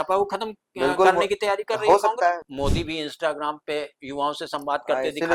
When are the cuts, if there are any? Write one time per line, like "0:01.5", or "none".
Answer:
0:02.4